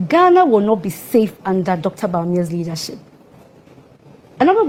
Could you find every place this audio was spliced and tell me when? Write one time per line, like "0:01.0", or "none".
none

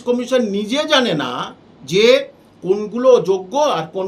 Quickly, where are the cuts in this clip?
none

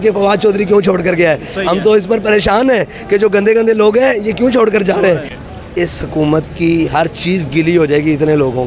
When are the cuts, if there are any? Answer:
0:05.3

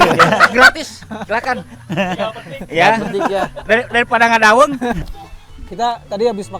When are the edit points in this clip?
0:05.0

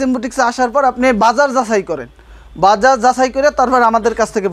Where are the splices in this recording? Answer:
none

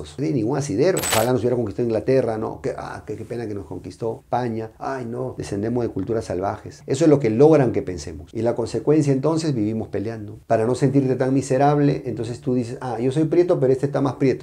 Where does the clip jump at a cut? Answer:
0:01.1

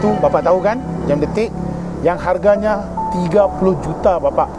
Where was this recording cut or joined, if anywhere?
none

